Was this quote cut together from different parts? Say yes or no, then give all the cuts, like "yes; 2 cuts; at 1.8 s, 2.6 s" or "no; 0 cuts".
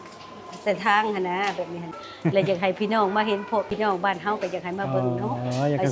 yes; 2 cuts; at 2.0 s, 3.7 s